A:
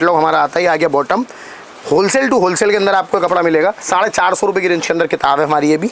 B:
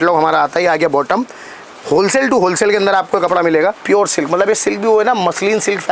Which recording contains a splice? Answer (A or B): B